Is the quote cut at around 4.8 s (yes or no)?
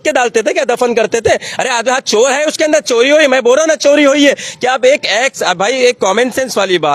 no